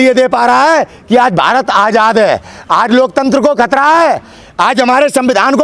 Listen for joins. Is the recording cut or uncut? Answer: uncut